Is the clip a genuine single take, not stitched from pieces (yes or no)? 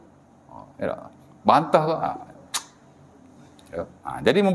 yes